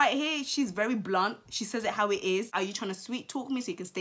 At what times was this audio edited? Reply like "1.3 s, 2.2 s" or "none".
2.5 s